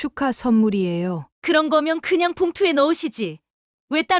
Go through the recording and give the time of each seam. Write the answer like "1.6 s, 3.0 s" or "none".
none